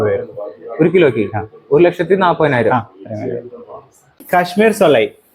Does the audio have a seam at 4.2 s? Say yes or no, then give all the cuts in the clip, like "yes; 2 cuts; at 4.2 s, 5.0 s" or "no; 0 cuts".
yes; 1 cut; at 4.2 s